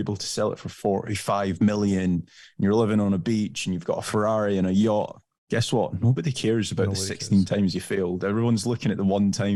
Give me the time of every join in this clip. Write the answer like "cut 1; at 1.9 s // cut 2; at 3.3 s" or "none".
none